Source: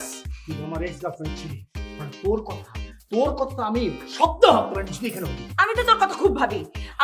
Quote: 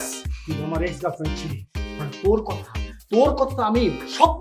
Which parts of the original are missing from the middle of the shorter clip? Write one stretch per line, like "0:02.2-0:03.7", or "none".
none